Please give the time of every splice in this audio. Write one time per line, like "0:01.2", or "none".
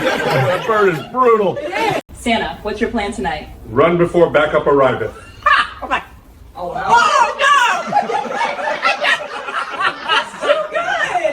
0:02.1